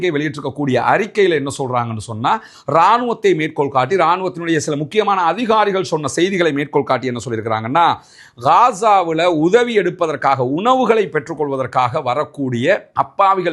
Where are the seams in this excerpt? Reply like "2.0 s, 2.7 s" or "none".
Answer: none